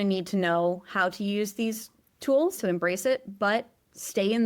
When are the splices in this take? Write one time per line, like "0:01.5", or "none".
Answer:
0:02.6